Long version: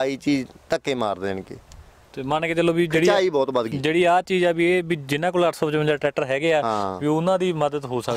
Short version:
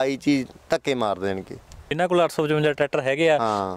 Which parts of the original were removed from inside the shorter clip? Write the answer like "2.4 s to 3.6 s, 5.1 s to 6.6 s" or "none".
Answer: 1.9 s to 5.1 s